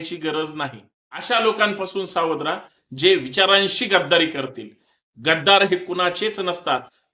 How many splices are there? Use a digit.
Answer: 1